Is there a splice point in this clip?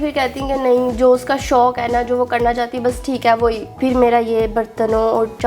yes; 1 cut; at 3.8 s

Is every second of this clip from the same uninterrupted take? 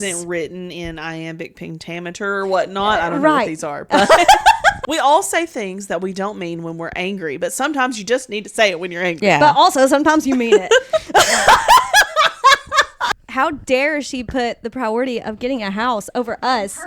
no; 2 cuts; at 4.8 s, 13.1 s

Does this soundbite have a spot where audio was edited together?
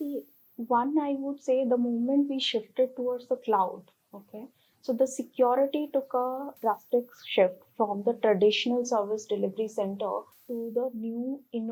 no; 0 cuts

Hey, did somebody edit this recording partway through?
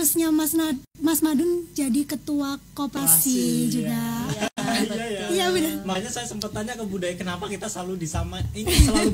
no; 0 cuts

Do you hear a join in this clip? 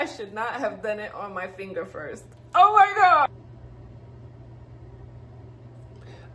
yes; 1 cut; at 3.3 s

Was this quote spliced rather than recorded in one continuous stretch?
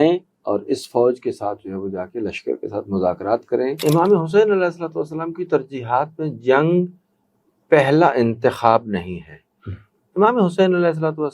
yes; 1 cut; at 3.8 s

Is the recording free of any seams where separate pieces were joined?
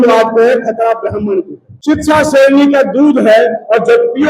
no; 1 cut; at 1.7 s

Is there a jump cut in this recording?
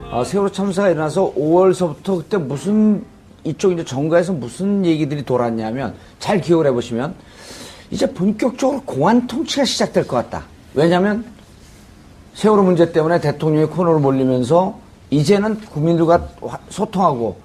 no; 0 cuts

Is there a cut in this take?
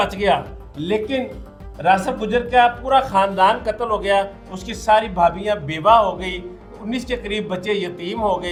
no; 0 cuts

